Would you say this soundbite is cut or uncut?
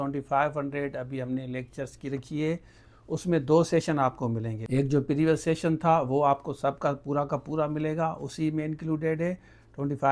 cut